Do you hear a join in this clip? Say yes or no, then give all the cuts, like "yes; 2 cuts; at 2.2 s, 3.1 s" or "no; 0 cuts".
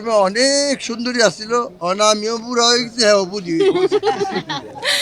no; 0 cuts